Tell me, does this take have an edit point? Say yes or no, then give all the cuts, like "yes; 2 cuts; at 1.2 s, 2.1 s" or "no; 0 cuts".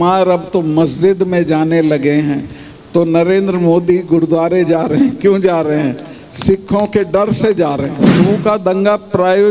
yes; 1 cut; at 8.2 s